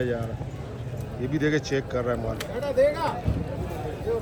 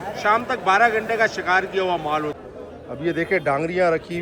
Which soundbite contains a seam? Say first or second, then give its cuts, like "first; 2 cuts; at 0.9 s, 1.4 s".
second; 1 cut; at 2.4 s